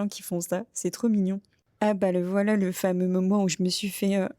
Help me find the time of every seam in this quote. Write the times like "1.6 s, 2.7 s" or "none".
1.4 s